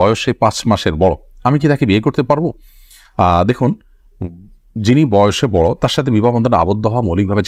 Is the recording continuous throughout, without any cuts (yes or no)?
yes